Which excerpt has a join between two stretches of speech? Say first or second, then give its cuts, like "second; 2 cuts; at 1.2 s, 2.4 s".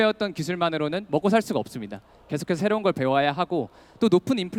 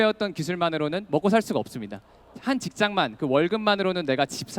second; 1 cut; at 2.2 s